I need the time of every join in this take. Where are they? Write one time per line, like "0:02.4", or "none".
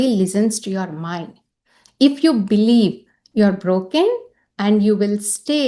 none